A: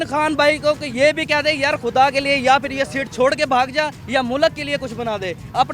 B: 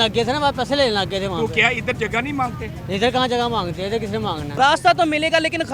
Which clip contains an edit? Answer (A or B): B